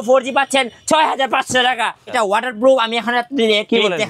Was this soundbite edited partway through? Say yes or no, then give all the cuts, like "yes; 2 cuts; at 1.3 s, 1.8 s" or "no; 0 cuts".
yes; 1 cut; at 2.1 s